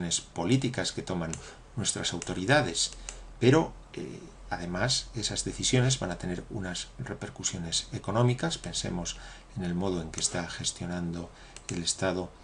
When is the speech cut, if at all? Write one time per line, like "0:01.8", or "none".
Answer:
0:09.5